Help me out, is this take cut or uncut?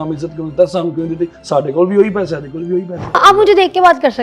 cut